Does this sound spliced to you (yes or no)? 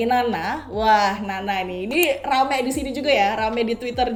no